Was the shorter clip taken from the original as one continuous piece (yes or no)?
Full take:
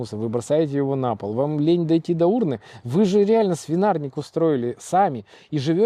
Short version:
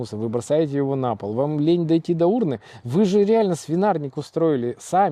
yes